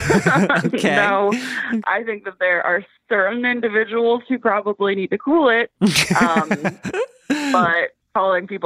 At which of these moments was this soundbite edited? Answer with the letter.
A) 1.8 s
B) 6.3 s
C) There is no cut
A